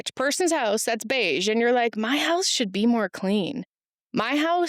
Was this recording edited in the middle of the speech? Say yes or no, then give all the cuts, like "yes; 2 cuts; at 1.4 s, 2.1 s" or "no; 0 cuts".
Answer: no; 0 cuts